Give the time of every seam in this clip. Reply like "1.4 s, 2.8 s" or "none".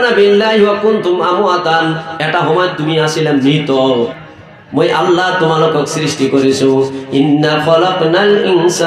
4.2 s